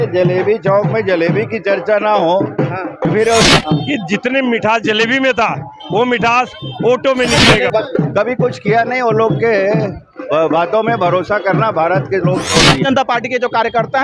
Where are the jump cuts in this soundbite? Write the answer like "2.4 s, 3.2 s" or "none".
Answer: 3.5 s, 7.7 s, 12.8 s